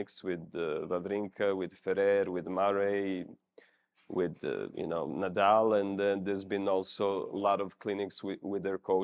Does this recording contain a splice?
no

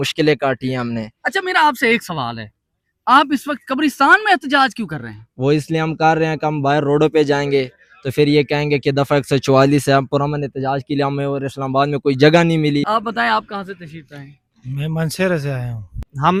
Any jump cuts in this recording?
no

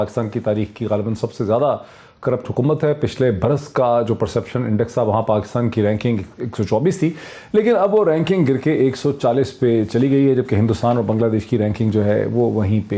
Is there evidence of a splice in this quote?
no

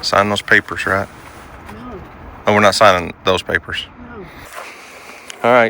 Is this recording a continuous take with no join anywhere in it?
no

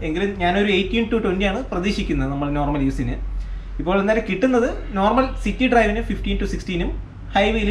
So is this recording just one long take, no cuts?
yes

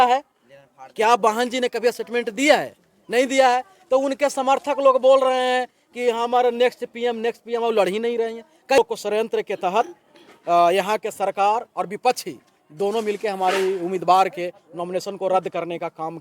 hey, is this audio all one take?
no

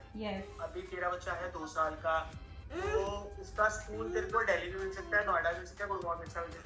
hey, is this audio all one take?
yes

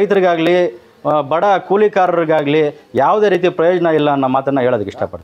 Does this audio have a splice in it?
no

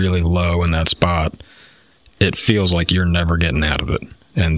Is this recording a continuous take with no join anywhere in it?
yes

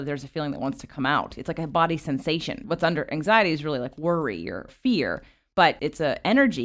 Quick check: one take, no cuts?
no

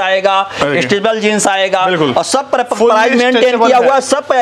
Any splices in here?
no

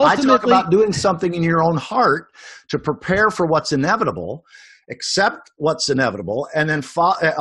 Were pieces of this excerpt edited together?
no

